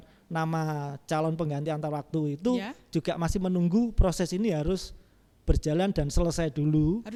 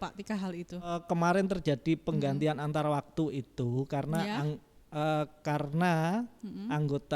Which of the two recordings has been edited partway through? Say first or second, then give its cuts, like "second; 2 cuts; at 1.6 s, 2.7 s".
second; 1 cut; at 1.0 s